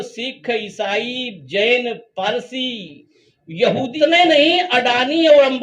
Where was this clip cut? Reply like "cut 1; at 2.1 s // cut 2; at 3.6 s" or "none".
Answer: cut 1; at 3.9 s